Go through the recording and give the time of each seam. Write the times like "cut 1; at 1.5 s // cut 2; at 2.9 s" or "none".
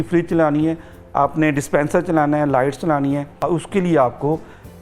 cut 1; at 3.3 s